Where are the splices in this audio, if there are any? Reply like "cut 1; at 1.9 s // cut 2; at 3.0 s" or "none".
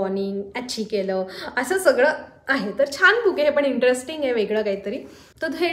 none